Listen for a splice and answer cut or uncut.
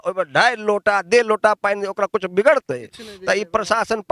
uncut